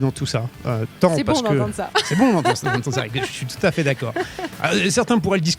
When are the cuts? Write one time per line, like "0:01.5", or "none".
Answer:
none